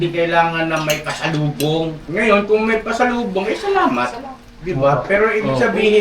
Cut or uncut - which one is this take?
cut